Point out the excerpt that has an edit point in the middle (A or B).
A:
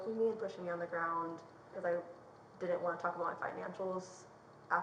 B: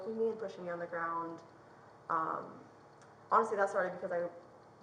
A